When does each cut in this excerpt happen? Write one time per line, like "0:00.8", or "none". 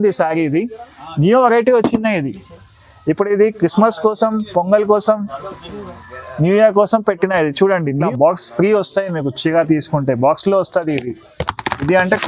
0:08.0

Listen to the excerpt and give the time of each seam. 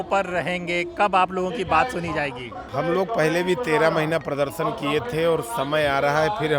0:02.5

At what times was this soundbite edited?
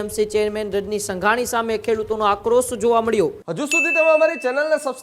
0:03.4

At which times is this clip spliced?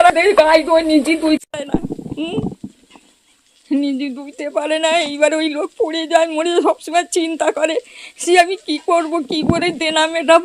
none

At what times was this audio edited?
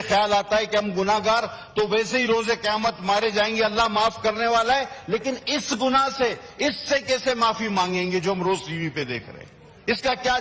none

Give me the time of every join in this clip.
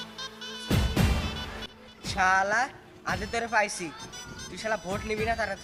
none

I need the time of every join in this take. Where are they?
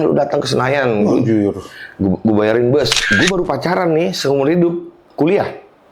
0:03.0

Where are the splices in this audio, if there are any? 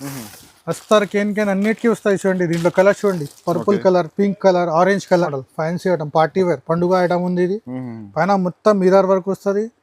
0:05.4

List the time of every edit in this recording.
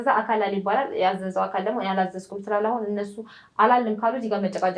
none

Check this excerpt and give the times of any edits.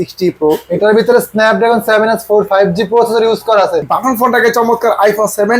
0:03.9

